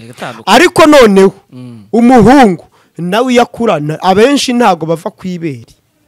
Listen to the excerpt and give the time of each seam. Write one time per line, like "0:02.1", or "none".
none

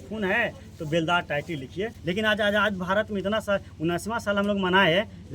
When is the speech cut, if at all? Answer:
0:02.0

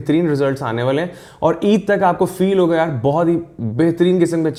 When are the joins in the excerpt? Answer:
none

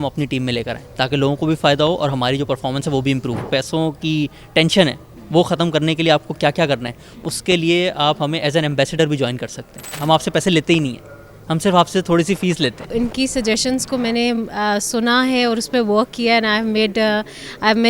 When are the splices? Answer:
0:03.5
0:09.9
0:12.9

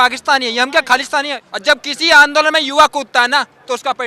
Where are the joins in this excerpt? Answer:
0:01.4

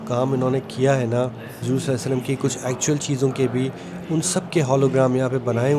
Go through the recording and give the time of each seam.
0:01.5

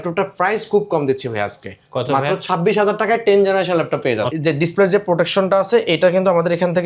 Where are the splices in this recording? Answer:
0:04.3

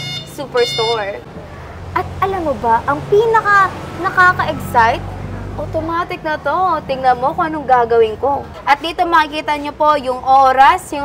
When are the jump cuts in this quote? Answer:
0:01.2
0:08.5

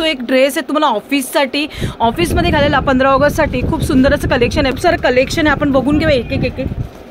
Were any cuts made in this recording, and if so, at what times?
0:04.7

